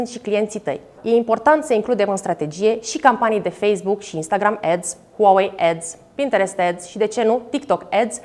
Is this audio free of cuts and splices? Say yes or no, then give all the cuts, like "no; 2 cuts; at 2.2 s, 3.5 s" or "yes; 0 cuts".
no; 1 cut; at 1.0 s